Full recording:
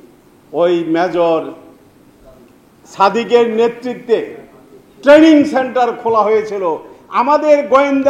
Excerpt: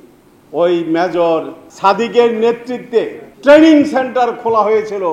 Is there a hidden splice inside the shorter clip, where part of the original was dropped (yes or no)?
yes